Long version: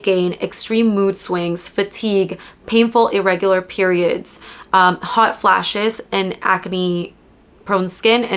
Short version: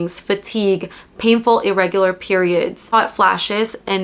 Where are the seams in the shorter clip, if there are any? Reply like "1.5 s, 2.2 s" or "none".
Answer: 2.8 s